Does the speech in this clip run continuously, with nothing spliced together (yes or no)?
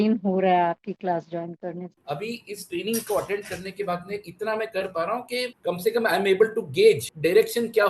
no